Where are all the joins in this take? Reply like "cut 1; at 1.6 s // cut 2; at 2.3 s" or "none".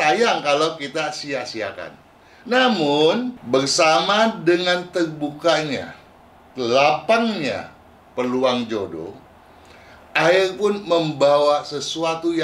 cut 1; at 3.4 s